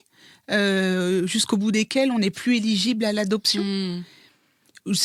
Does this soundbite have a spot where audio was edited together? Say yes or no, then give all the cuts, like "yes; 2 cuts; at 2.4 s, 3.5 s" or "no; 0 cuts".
no; 0 cuts